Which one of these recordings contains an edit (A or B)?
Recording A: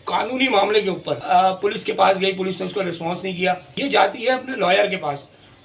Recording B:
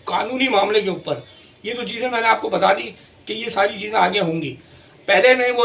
A